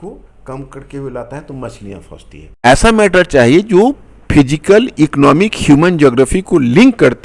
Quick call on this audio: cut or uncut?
cut